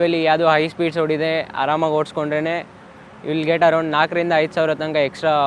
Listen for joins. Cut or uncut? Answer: uncut